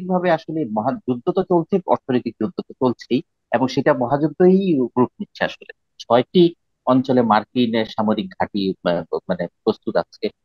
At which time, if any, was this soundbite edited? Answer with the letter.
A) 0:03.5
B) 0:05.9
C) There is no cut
B